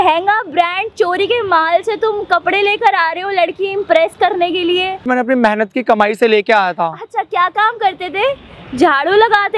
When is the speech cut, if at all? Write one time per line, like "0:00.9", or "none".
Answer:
0:05.1